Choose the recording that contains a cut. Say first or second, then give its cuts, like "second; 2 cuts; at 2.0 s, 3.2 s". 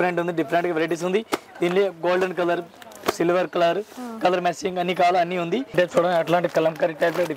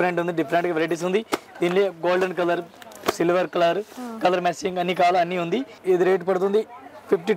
first; 1 cut; at 5.7 s